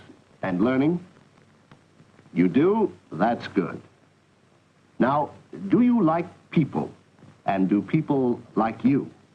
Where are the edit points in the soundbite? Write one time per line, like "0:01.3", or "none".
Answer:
0:05.2